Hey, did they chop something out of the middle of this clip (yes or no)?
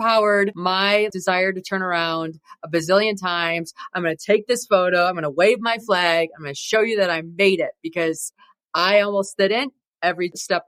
no